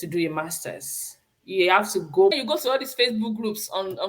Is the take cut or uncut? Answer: cut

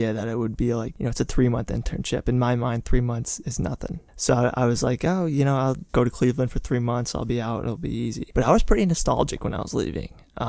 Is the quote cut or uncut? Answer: uncut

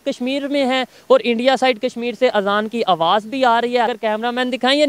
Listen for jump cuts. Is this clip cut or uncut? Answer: cut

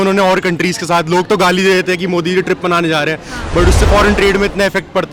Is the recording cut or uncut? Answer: uncut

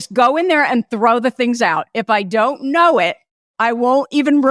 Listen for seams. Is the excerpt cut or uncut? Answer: cut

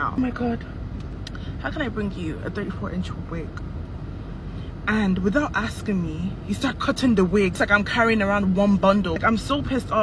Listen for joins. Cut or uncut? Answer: uncut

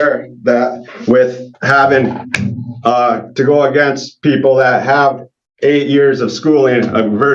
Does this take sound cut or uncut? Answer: uncut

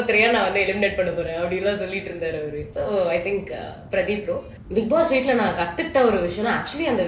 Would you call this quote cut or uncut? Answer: cut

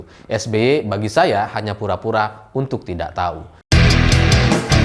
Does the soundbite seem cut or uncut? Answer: cut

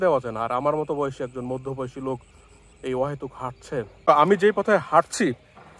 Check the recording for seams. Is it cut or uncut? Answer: cut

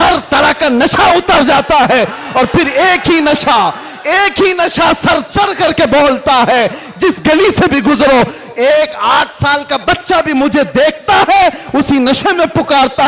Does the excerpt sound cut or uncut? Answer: uncut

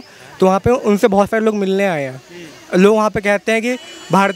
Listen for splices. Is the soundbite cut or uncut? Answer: uncut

